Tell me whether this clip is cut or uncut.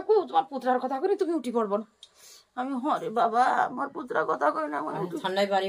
uncut